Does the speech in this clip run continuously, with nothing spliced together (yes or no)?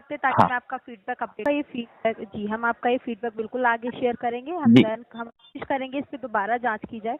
no